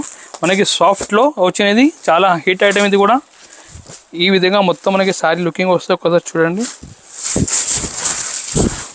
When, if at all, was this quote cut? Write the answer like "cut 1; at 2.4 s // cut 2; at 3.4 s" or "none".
none